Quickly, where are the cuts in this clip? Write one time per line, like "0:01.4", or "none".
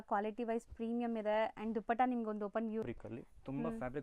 0:02.8